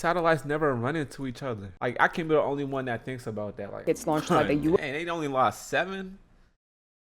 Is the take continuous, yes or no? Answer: no